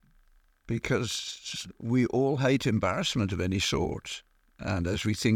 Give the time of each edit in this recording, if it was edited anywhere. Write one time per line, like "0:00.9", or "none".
none